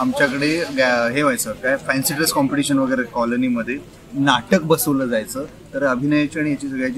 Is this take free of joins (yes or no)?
yes